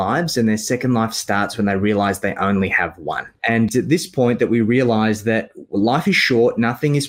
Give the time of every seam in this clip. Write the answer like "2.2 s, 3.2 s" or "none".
3.6 s